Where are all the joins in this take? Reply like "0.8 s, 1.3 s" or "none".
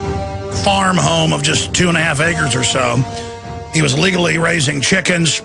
3.1 s